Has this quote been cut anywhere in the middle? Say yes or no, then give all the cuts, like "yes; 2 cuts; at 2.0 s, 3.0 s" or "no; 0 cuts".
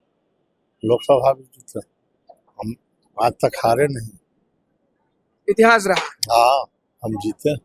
no; 0 cuts